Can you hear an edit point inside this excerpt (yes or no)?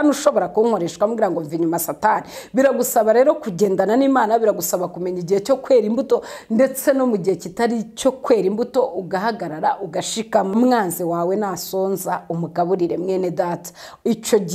yes